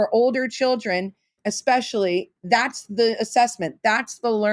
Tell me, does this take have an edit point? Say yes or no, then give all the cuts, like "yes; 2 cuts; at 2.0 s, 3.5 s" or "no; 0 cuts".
yes; 2 cuts; at 1.4 s, 2.3 s